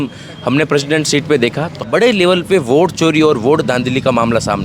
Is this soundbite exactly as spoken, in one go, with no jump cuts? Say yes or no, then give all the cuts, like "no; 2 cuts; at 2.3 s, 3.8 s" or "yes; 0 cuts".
no; 1 cut; at 1.8 s